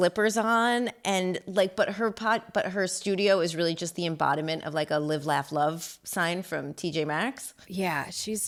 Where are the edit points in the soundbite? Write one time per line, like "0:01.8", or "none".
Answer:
none

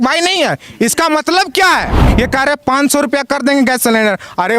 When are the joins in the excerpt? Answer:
0:02.0

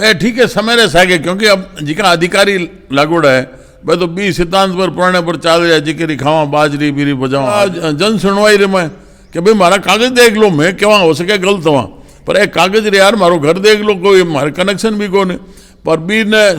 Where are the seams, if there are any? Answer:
0:07.6

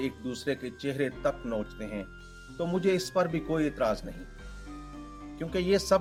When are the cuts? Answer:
none

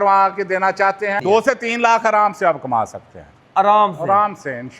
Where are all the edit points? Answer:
0:01.2

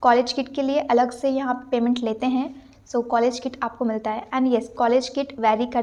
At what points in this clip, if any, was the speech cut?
none

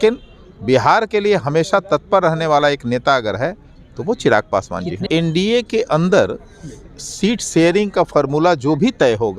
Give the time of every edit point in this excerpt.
0:05.0

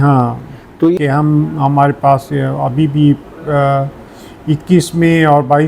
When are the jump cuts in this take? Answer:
0:00.9

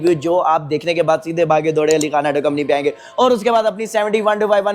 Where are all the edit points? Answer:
none

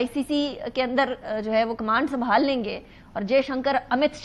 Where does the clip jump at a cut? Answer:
none

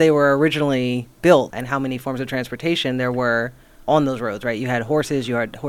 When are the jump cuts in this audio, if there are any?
0:01.6

